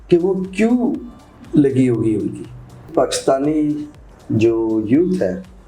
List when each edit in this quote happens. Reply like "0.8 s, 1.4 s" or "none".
2.9 s